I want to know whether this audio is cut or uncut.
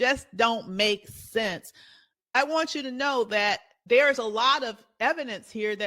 cut